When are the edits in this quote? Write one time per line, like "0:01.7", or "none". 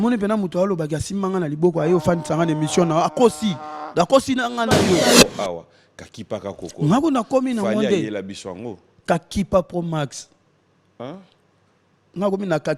0:05.1